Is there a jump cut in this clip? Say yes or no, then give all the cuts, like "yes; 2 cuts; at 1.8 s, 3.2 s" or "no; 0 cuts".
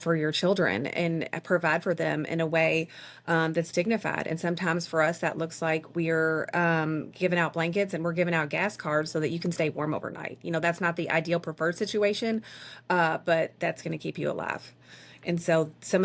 no; 0 cuts